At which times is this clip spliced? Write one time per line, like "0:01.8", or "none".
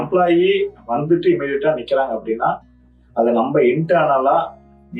none